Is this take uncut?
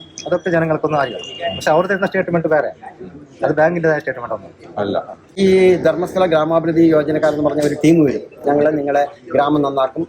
no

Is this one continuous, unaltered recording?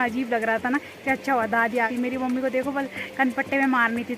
no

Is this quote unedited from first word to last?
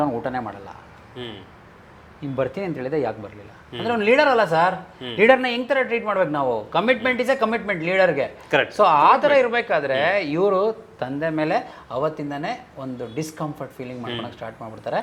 yes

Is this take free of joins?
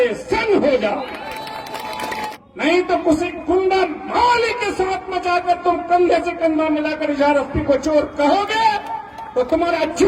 no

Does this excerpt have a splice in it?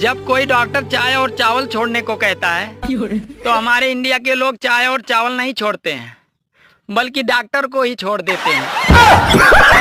no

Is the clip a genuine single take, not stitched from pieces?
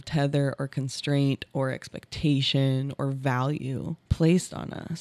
no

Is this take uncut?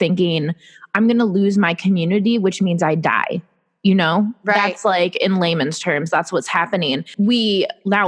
no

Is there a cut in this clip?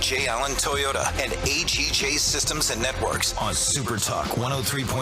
yes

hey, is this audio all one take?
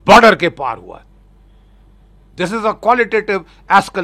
yes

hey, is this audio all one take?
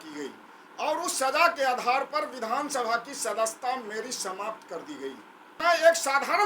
no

